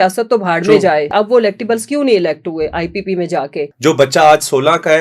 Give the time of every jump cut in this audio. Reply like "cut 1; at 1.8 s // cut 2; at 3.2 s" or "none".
cut 1; at 1.1 s // cut 2; at 3.7 s